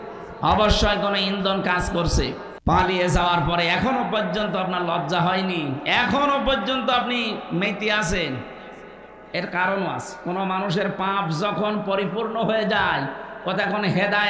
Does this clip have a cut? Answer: yes; 1 cut; at 2.5 s

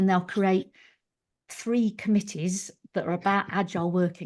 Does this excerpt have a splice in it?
no; 0 cuts

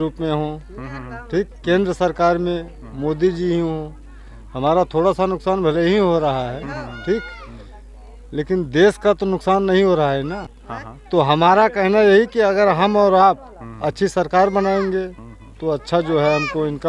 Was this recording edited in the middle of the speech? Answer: yes; 1 cut; at 10.6 s

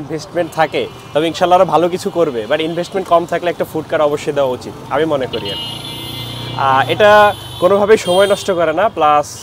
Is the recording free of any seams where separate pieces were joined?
no; 1 cut; at 4.7 s

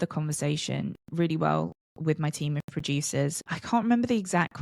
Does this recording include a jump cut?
yes; 1 cut; at 3.5 s

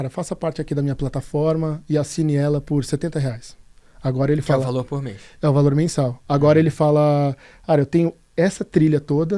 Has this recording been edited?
no; 0 cuts

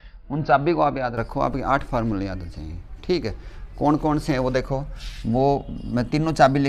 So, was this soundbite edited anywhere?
no; 0 cuts

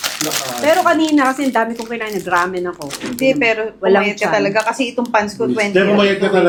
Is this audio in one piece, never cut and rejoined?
yes; 0 cuts

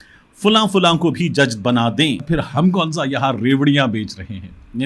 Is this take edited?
yes; 1 cut; at 2.2 s

